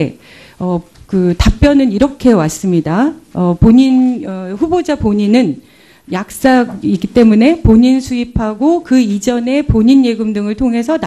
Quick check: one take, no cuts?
yes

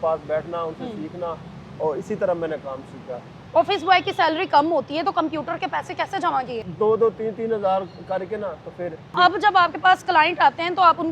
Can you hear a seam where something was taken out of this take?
yes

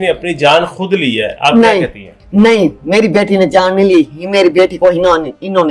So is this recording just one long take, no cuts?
yes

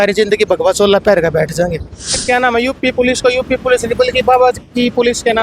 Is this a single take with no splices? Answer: no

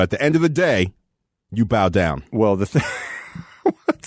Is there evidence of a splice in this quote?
yes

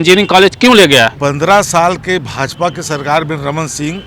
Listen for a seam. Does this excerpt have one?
yes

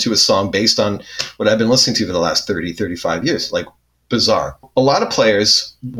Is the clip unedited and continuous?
no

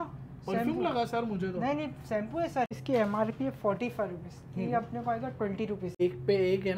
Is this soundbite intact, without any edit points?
no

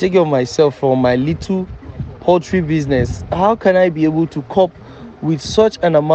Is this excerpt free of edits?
yes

